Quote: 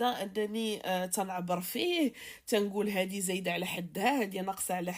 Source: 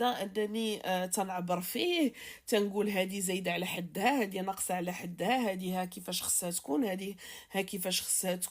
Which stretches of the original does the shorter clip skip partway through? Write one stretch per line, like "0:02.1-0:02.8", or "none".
none